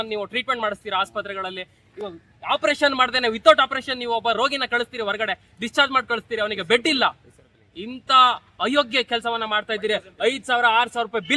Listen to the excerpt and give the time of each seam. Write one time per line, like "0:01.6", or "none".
none